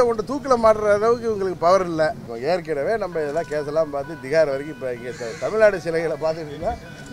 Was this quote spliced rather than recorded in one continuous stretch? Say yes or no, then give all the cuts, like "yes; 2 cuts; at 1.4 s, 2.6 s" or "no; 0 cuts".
yes; 1 cut; at 2.3 s